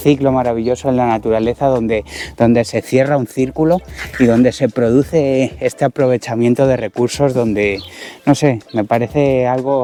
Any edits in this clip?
no; 0 cuts

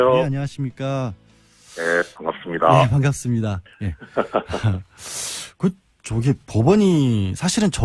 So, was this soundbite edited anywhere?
no; 0 cuts

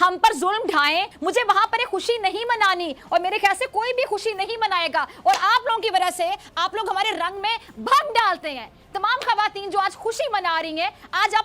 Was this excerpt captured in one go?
yes; 0 cuts

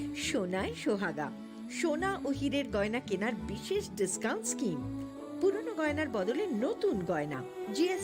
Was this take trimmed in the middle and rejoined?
no; 0 cuts

